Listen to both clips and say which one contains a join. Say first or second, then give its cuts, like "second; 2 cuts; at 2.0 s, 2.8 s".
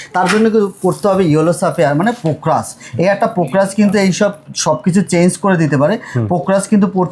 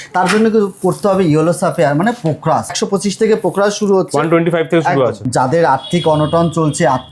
second; 2 cuts; at 2.8 s, 5.3 s